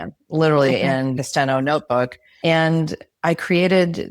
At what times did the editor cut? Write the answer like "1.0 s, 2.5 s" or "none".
1.1 s, 2.2 s

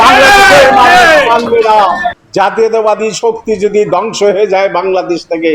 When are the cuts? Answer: 2.2 s

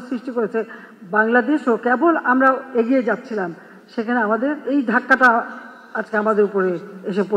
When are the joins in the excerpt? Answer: 4.6 s

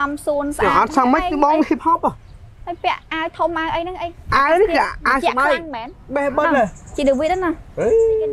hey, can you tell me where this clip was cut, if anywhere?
none

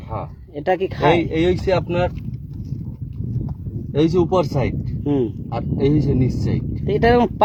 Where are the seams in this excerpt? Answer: none

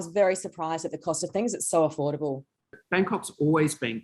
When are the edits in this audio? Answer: 2.7 s

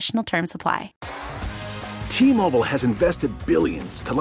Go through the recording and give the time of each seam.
1.0 s

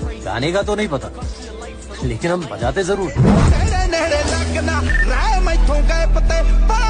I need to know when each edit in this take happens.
none

